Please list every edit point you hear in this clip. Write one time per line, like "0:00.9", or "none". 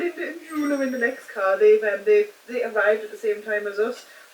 none